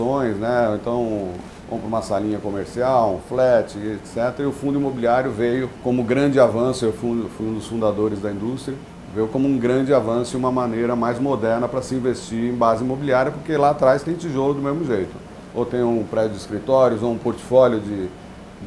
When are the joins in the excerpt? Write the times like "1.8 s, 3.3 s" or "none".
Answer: 5.7 s